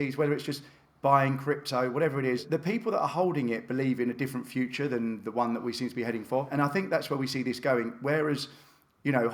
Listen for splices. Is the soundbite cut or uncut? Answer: cut